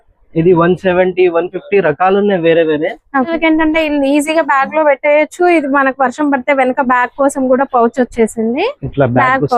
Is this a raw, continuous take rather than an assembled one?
no; 1 cut; at 3.3 s

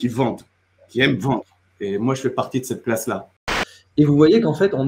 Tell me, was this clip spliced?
yes; 1 cut; at 3.5 s

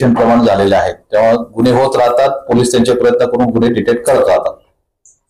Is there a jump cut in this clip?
no; 0 cuts

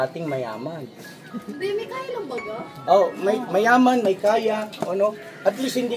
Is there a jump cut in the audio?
no; 0 cuts

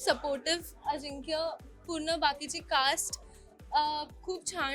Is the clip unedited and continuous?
yes; 0 cuts

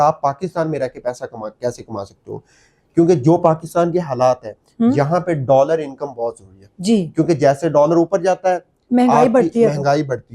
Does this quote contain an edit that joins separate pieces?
no; 0 cuts

